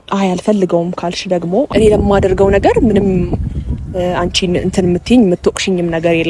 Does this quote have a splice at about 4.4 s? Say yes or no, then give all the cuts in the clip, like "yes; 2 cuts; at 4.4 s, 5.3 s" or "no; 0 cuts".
no; 1 cut; at 1.7 s